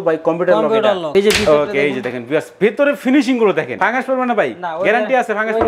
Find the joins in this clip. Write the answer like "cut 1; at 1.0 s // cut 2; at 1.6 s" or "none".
cut 1; at 1.0 s // cut 2; at 3.7 s

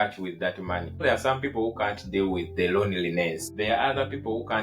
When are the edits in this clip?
cut 1; at 1.0 s // cut 2; at 3.4 s

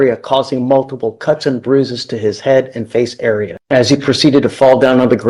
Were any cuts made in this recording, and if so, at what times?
cut 1; at 3.6 s

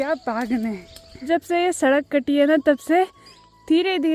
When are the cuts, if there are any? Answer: cut 1; at 1.2 s

